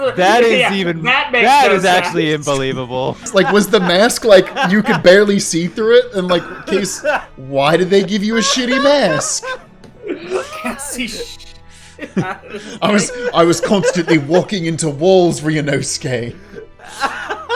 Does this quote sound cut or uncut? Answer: cut